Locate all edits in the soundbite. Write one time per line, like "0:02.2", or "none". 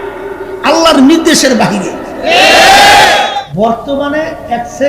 0:03.3